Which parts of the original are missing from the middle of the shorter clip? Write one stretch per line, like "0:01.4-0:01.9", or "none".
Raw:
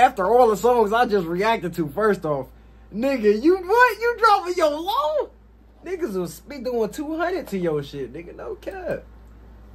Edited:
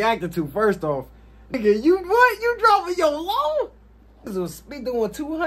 0:03.0-0:03.1
0:05.9-0:06.1